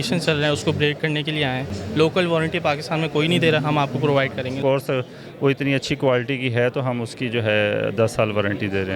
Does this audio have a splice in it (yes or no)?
yes